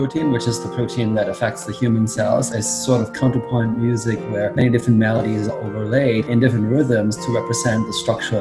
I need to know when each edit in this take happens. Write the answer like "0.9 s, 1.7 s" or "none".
none